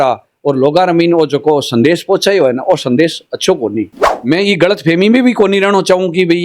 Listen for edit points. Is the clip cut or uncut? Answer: cut